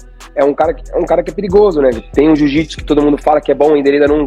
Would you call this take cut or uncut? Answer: uncut